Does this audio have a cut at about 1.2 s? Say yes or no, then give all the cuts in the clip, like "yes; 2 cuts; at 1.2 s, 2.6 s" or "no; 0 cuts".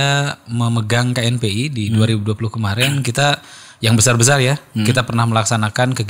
no; 0 cuts